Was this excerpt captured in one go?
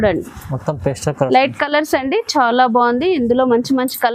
yes; 0 cuts

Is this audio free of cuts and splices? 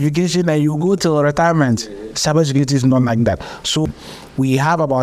no; 1 cut; at 3.9 s

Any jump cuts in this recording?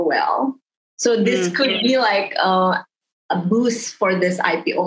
no; 0 cuts

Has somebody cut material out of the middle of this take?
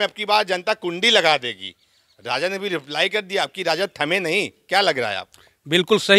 no; 0 cuts

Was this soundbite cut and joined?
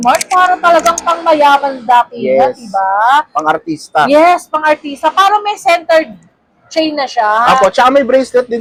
no; 0 cuts

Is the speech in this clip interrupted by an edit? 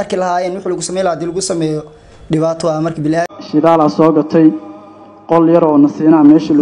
yes; 1 cut; at 3.3 s

